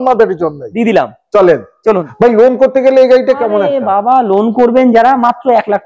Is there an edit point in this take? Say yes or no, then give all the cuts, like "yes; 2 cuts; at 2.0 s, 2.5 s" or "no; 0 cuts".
yes; 1 cut; at 2.1 s